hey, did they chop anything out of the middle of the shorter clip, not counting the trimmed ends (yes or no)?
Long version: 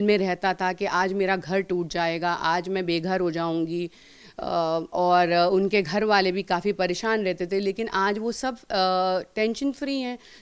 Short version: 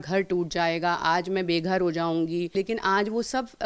yes